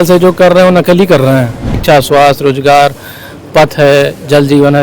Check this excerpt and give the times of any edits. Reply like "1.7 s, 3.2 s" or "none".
1.7 s